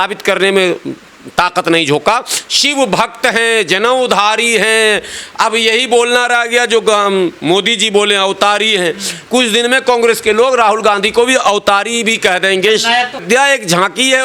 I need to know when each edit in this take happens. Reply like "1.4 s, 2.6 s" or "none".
13.2 s

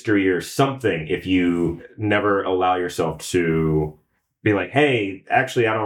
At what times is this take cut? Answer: none

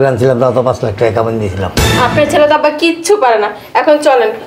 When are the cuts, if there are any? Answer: 2.0 s

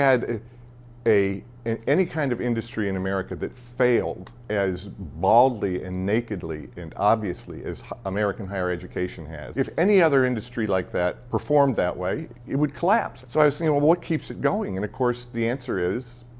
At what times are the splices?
9.4 s, 11.2 s, 13.2 s

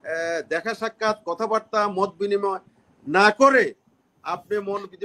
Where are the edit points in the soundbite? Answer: none

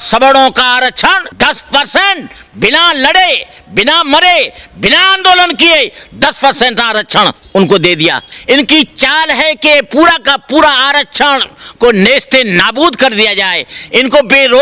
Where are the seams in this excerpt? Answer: 1.3 s, 8.3 s

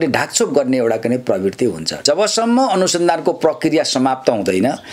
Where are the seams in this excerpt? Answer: 2.0 s

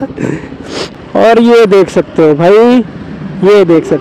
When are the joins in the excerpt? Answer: 1.0 s

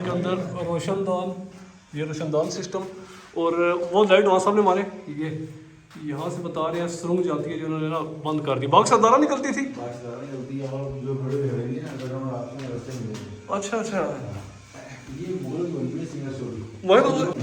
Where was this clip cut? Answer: none

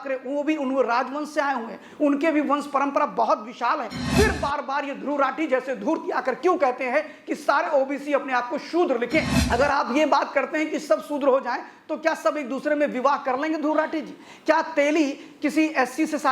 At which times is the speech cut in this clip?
4.0 s, 9.4 s

